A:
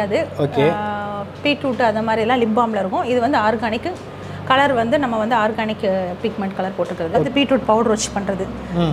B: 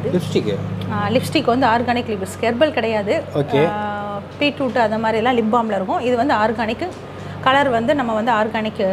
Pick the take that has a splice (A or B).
A